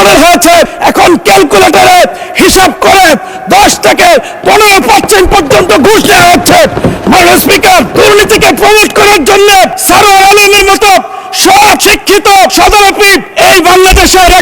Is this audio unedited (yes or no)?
yes